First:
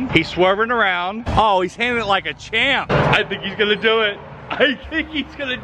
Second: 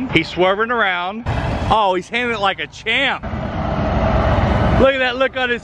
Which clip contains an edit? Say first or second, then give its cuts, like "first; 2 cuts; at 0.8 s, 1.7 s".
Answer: first; 2 cuts; at 1.2 s, 2.9 s